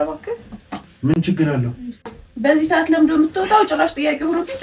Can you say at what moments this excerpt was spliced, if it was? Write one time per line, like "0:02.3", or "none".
0:02.2